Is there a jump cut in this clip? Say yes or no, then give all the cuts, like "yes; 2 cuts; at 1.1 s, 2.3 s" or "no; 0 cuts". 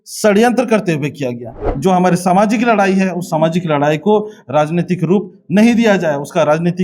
yes; 1 cut; at 1.5 s